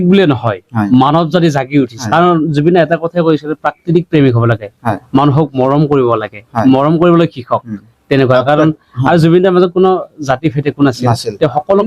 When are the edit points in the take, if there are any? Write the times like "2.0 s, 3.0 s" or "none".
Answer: 2.0 s